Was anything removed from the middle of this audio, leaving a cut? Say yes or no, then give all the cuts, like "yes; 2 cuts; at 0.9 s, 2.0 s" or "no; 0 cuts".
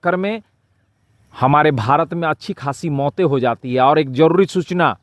no; 0 cuts